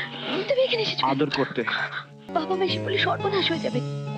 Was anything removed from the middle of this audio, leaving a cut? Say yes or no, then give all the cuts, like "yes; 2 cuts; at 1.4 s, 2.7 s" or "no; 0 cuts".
yes; 1 cut; at 2.2 s